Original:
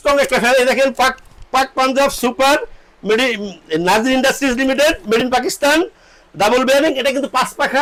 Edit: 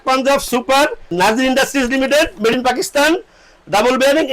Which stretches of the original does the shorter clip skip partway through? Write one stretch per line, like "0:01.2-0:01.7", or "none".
0:02.8-0:03.8